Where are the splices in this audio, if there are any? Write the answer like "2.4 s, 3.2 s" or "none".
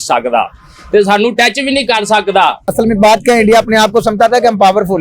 2.7 s